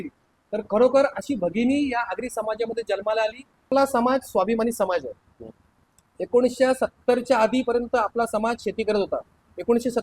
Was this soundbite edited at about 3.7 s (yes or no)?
yes